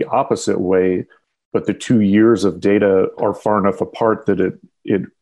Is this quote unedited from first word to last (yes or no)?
no